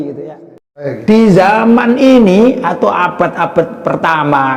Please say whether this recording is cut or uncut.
cut